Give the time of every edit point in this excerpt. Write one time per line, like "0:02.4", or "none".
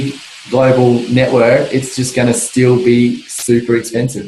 none